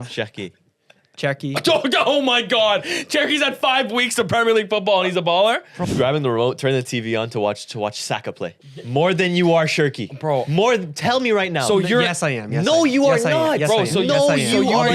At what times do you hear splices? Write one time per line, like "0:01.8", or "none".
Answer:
0:05.8
0:08.9